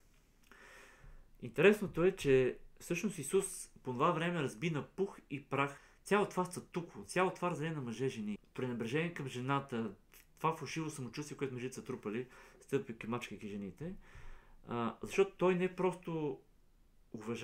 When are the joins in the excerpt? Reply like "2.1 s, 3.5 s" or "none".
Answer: 5.9 s, 8.5 s